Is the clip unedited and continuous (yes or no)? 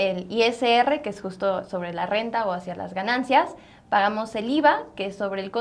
yes